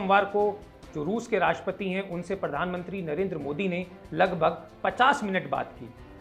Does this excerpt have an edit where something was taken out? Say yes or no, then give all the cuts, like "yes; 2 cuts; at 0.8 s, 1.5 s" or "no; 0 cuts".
no; 0 cuts